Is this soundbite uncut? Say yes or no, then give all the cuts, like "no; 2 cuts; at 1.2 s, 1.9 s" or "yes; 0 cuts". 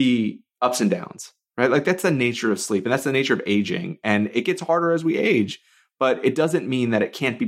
yes; 0 cuts